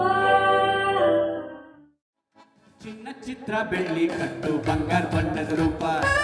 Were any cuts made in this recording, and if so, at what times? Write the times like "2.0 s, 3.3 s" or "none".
none